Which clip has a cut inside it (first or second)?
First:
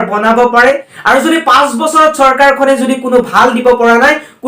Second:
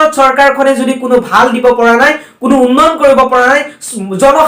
first